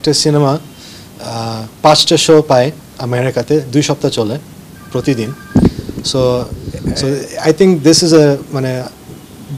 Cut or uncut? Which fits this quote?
cut